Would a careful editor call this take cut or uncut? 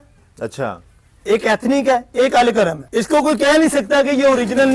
cut